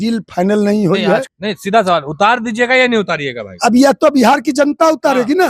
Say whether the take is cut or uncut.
cut